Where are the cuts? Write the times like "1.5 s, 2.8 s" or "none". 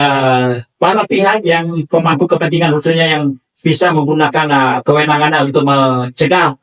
none

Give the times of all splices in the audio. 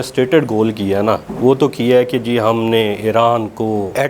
none

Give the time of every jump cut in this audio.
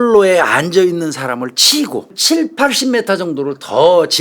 2.2 s

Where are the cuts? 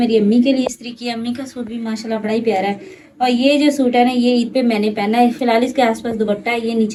none

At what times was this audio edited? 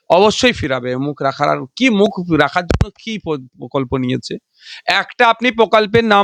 none

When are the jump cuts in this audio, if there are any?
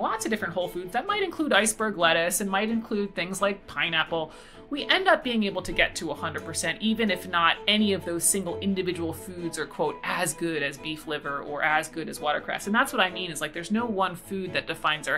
none

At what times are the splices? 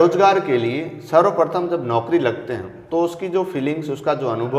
none

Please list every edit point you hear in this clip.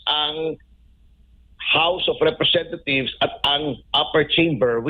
none

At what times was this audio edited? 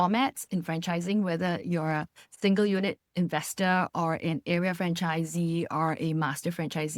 none

